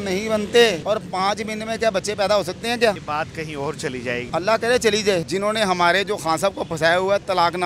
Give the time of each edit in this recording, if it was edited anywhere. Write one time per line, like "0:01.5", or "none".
0:05.3